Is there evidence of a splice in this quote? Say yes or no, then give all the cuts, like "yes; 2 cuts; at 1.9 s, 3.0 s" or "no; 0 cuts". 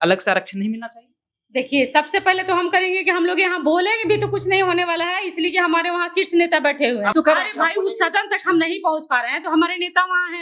yes; 1 cut; at 7.1 s